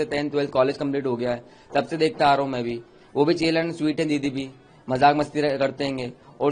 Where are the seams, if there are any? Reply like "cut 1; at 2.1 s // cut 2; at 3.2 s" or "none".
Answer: none